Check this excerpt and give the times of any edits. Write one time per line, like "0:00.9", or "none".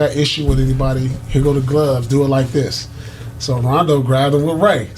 none